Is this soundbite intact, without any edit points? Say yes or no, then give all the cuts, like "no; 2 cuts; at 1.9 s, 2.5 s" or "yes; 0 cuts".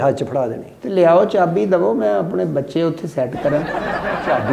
yes; 0 cuts